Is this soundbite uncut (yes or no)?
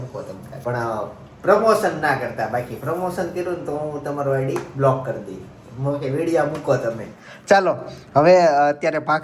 yes